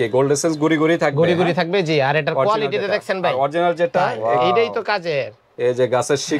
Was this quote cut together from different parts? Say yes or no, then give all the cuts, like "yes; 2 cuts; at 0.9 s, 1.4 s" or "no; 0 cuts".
yes; 1 cut; at 4.2 s